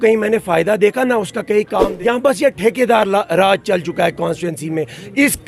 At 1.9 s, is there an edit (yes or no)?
yes